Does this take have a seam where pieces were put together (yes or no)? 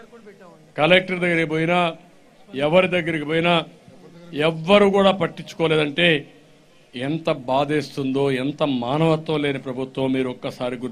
no